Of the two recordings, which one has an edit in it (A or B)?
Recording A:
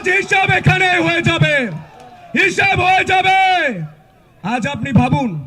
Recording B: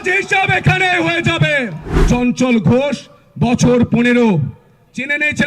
B